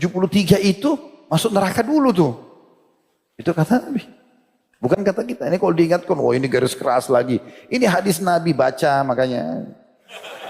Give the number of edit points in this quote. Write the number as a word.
one